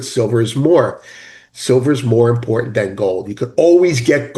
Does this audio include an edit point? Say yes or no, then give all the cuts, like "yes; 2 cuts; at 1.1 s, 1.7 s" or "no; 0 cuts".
no; 0 cuts